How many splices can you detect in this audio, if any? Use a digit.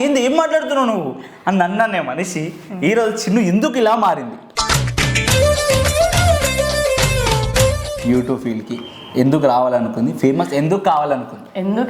1